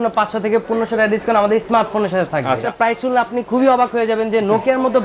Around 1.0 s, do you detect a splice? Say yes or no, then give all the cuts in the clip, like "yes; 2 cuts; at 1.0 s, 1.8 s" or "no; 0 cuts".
no; 1 cut; at 2.7 s